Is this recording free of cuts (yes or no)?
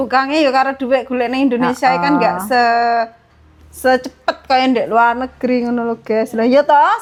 yes